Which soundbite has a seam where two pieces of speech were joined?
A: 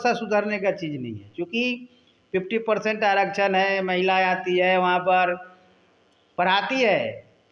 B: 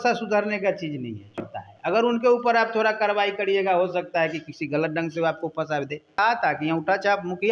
B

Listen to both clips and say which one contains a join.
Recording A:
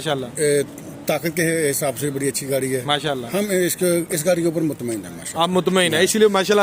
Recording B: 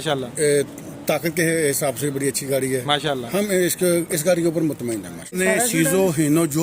B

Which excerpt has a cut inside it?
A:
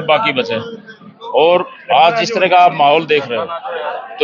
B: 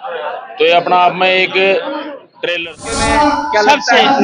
B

